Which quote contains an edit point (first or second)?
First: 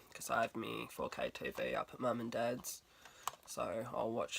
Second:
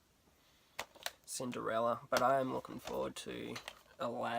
first